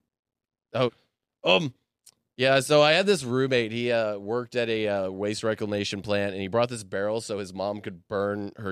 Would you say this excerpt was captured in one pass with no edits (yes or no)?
no